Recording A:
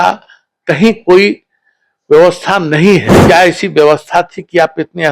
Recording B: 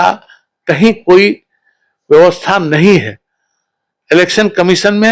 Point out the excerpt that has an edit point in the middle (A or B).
A